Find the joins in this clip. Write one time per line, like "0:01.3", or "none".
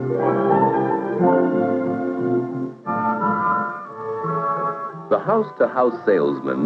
none